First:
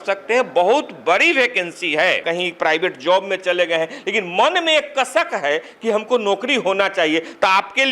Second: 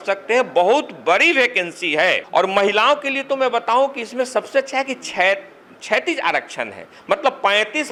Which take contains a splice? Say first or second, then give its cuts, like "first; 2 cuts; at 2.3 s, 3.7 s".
first; 1 cut; at 2.2 s